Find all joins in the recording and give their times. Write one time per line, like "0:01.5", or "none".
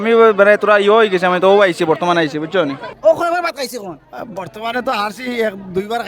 0:02.8